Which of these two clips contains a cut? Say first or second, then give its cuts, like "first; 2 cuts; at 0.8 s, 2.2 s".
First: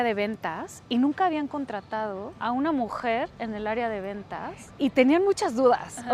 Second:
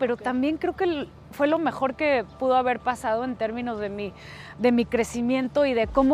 first; 2 cuts; at 2.3 s, 4.6 s